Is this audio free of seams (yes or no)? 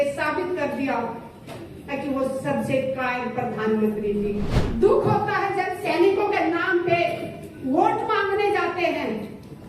no